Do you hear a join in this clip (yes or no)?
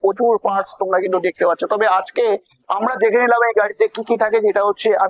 no